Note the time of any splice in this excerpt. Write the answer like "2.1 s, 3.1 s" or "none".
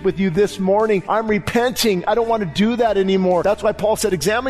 1.0 s, 3.4 s